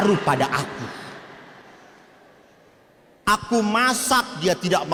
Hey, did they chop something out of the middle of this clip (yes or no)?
no